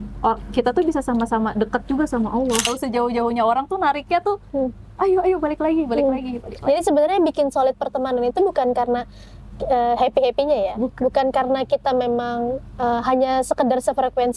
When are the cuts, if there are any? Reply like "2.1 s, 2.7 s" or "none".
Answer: 2.7 s

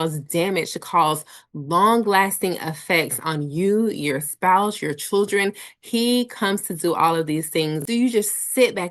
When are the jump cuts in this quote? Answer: 7.8 s

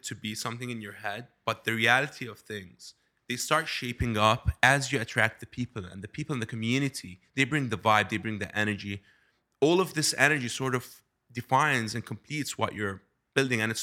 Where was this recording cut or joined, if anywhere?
9.4 s

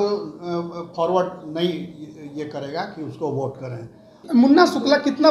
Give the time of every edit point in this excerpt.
4.2 s

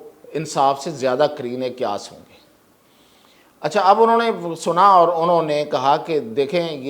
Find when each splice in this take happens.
none

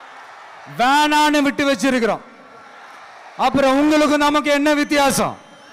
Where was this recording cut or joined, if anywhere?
none

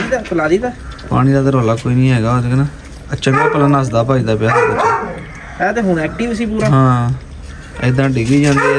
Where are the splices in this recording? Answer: none

